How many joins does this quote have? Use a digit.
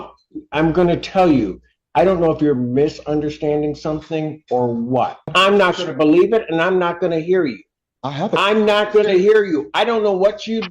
1